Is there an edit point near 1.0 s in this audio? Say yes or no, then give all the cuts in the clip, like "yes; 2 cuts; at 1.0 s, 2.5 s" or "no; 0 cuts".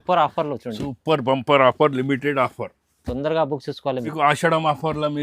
no; 1 cut; at 4.1 s